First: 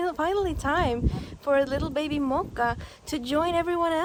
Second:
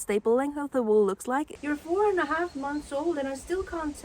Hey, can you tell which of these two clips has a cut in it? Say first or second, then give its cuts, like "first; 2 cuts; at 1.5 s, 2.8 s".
second; 1 cut; at 1.5 s